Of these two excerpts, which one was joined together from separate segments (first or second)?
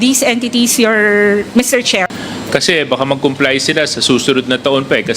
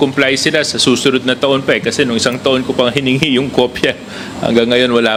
first